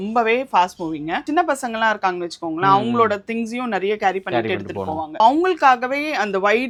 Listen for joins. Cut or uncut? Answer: uncut